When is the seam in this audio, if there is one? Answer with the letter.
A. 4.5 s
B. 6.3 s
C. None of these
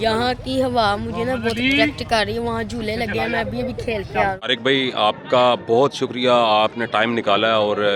A